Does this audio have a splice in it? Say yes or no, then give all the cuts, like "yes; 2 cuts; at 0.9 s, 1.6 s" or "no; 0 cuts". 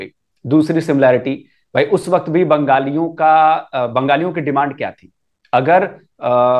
no; 0 cuts